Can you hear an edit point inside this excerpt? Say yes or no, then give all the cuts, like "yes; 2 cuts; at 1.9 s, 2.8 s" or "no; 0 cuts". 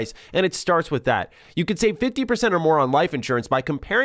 yes; 1 cut; at 1.4 s